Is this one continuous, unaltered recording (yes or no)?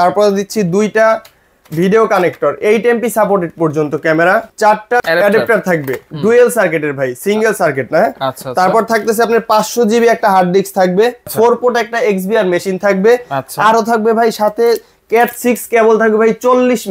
no